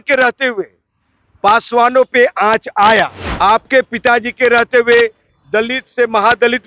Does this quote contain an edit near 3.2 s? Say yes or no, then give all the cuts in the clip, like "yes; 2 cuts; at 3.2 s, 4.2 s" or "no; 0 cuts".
yes; 1 cut; at 3.2 s